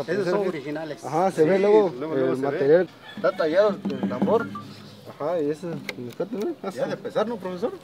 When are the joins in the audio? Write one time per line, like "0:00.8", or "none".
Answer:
0:03.0